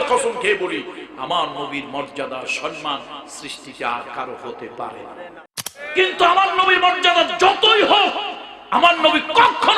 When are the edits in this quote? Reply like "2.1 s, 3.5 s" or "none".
5.8 s